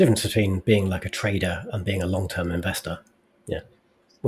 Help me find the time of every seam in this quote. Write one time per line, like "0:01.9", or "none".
none